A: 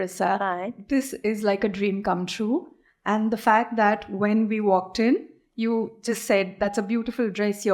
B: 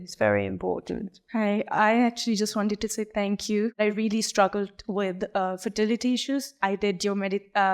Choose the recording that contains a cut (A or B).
B